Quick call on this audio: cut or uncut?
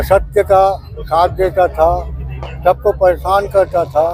uncut